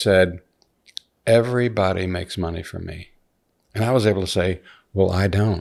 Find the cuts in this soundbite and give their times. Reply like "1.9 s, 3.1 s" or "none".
none